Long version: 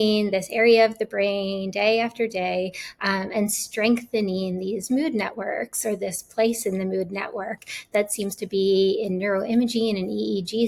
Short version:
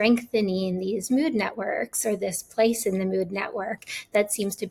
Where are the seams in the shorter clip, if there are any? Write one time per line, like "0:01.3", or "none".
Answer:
none